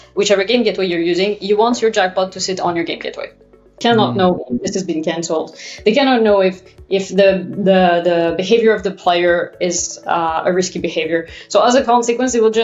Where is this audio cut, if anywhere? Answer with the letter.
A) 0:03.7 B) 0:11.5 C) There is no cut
A